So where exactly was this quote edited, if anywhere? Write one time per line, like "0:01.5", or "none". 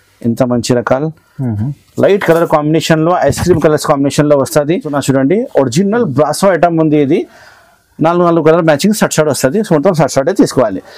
0:04.9